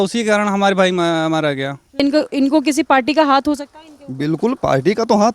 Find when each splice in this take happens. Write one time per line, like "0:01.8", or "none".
0:02.0